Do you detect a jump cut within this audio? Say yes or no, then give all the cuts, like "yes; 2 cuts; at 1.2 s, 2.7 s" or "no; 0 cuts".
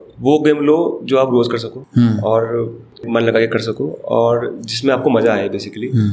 yes; 2 cuts; at 1.7 s, 3.0 s